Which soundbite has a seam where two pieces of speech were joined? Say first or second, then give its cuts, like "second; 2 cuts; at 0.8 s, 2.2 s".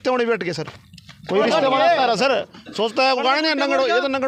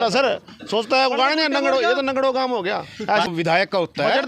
second; 1 cut; at 3.3 s